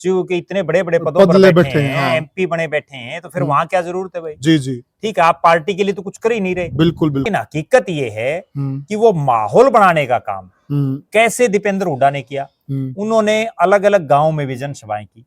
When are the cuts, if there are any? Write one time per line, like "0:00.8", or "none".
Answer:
0:07.2